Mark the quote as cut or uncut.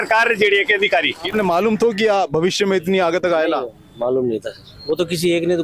cut